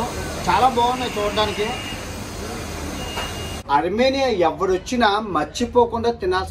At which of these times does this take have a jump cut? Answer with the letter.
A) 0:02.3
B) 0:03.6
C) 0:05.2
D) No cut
B